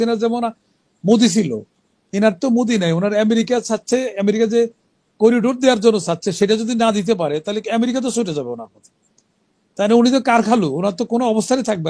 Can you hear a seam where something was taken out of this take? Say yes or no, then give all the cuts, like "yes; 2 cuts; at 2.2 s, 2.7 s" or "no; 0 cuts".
no; 0 cuts